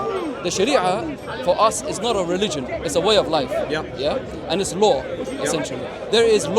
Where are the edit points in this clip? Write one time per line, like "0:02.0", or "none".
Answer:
none